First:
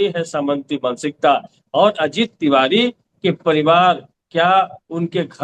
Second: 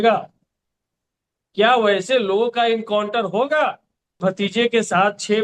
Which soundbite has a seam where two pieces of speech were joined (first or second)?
second